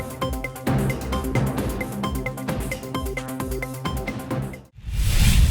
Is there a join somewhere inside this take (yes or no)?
yes